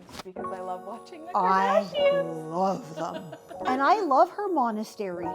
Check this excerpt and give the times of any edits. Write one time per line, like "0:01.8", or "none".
0:03.7